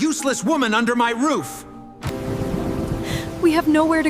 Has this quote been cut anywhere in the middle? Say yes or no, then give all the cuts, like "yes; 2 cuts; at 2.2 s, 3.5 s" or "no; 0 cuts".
yes; 1 cut; at 2.0 s